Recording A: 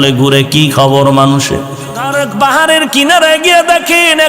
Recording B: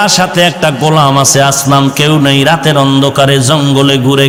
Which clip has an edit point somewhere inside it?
A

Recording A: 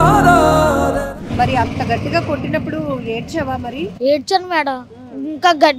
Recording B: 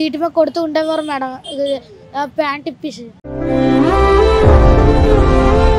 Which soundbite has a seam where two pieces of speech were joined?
A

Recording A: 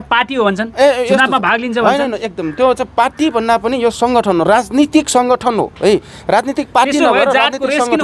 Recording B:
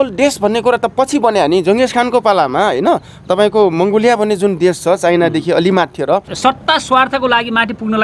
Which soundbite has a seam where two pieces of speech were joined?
B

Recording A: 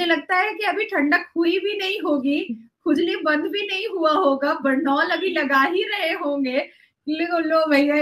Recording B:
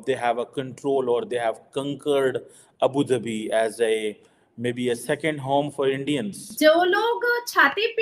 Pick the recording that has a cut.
B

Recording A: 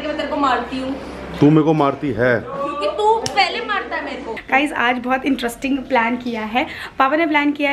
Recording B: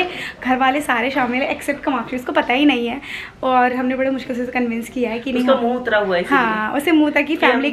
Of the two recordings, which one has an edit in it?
A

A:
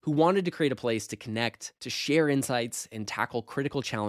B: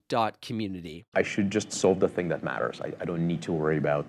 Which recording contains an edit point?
B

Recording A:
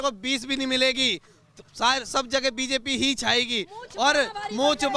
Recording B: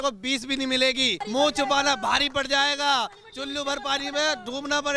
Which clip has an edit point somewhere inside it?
B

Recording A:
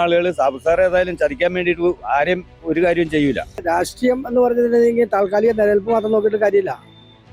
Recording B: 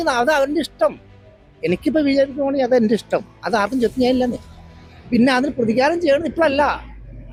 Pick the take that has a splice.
A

